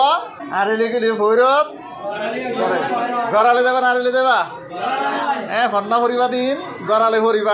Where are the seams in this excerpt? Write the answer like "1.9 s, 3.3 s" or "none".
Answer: none